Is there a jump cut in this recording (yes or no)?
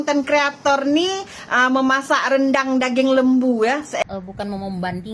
yes